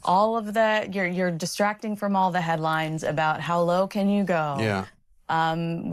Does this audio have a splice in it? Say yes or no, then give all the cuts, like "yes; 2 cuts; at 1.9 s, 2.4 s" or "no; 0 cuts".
no; 0 cuts